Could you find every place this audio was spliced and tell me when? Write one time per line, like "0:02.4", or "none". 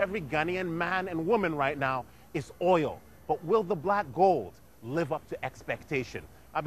0:01.8